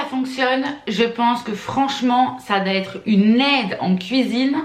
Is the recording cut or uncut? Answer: uncut